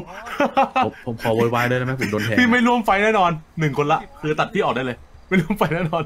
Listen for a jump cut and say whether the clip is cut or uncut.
uncut